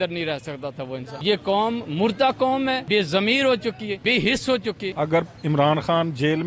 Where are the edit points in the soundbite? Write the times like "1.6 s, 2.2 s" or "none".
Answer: 1.1 s, 2.8 s, 4.0 s, 4.9 s